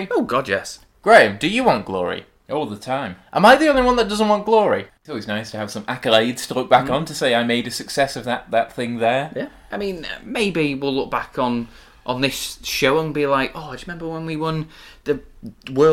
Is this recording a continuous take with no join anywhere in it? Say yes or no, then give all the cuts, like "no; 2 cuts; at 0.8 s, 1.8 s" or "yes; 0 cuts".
no; 2 cuts; at 4.9 s, 9.7 s